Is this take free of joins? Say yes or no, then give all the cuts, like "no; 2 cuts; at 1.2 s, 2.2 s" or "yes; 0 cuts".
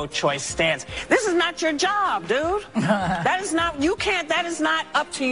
no; 1 cut; at 0.9 s